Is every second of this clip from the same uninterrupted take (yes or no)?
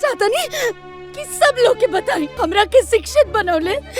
no